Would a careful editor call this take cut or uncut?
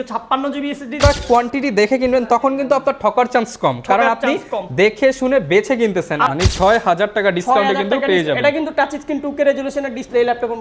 cut